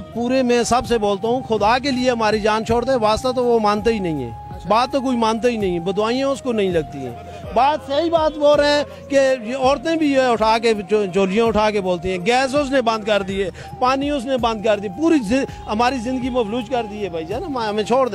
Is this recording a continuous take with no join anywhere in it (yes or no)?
yes